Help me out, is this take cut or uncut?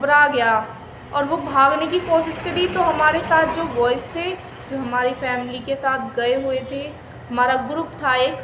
uncut